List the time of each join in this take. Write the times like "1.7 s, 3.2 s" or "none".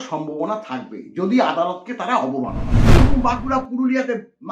3.0 s